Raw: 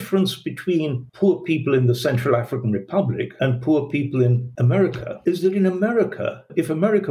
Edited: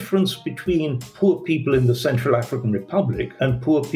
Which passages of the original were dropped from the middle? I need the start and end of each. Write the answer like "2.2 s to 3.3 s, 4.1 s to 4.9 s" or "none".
none